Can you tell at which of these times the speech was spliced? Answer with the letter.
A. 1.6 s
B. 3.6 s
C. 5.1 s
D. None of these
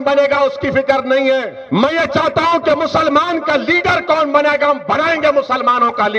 A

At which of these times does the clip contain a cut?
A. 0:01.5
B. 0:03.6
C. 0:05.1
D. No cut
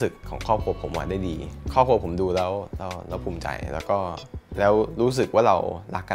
A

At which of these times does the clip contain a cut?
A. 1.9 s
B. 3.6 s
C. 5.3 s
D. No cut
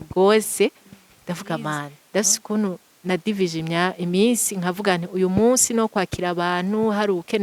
A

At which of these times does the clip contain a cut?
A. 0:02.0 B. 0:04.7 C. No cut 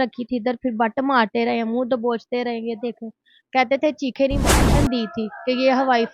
B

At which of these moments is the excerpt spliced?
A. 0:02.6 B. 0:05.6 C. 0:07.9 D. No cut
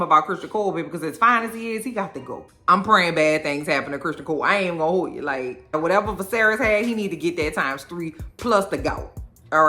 A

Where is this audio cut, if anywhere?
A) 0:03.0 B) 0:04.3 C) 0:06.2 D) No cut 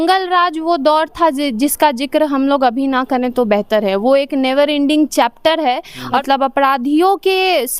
C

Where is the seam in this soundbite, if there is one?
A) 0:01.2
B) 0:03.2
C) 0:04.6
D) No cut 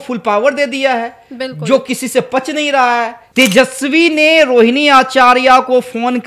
B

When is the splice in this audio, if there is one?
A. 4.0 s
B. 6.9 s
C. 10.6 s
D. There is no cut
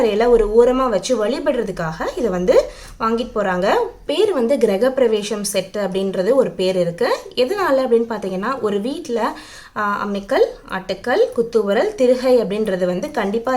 A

